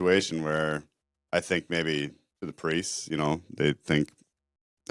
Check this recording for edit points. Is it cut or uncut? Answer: uncut